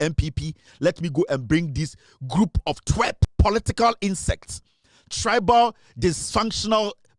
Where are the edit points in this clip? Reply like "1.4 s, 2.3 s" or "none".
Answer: 3.2 s